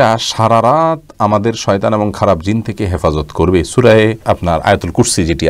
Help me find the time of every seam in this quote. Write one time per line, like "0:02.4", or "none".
none